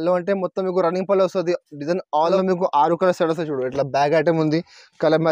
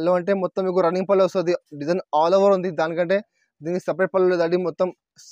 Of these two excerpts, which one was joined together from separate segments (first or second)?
first